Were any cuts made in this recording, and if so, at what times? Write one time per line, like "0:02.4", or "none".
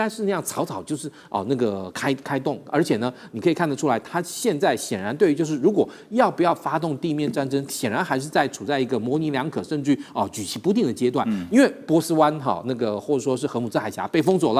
none